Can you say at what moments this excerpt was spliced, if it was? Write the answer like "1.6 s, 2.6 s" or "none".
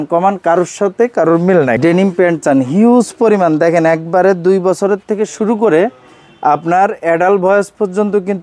1.8 s

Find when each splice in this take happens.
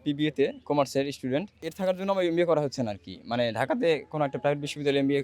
1.6 s

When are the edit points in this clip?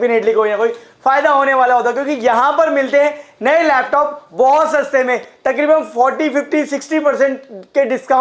none

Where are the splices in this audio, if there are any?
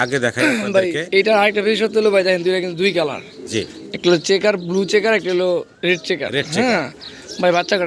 none

